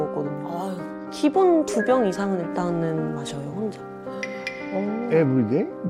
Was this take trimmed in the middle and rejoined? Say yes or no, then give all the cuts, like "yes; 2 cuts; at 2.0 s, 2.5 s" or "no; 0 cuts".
no; 0 cuts